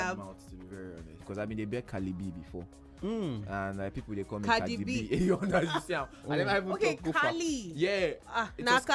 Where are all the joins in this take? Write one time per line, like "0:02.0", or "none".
0:01.2

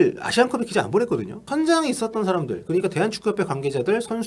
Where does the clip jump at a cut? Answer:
0:01.4

